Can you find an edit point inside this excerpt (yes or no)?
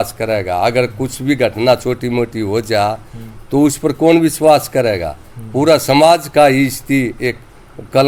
no